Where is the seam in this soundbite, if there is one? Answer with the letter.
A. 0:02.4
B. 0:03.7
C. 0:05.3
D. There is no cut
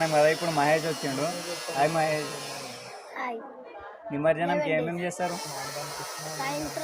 B